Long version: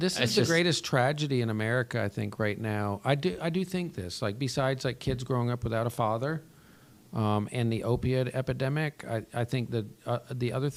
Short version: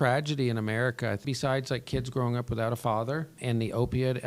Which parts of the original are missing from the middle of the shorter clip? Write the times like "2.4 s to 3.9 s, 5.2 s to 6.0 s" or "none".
2.1 s to 4.4 s, 6.5 s to 7.5 s